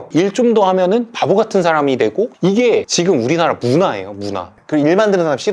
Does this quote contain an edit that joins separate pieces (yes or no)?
no